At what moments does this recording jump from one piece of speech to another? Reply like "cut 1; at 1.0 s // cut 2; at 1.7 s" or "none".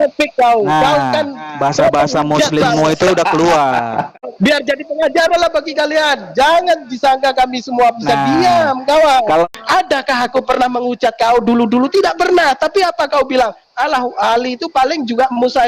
cut 1; at 4.3 s // cut 2; at 9.4 s